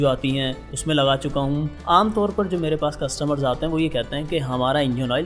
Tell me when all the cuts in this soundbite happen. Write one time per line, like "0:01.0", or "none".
0:01.8